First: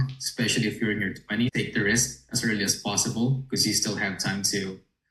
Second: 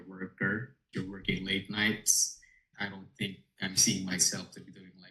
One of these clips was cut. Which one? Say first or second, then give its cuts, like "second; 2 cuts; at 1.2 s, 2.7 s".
second; 2 cuts; at 0.9 s, 2.7 s